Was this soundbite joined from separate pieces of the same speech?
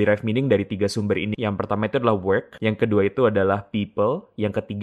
yes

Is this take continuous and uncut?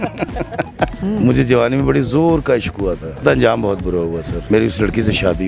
no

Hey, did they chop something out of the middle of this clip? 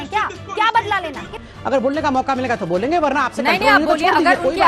yes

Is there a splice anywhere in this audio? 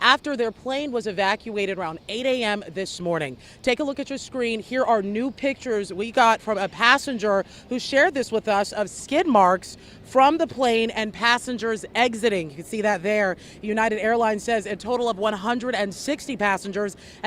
yes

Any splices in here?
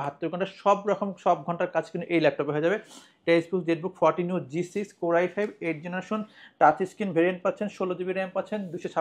no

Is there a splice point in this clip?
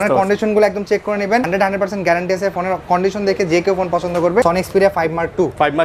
yes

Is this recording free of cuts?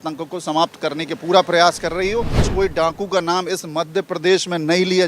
no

